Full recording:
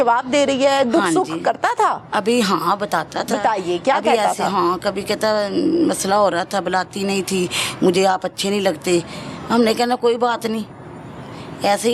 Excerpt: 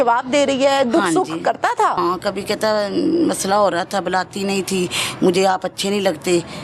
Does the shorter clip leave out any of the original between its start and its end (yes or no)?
yes